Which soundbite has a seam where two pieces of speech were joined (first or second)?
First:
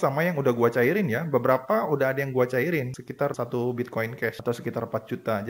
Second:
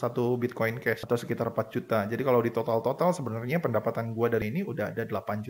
second